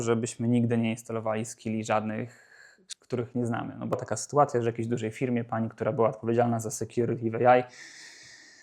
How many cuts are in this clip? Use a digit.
1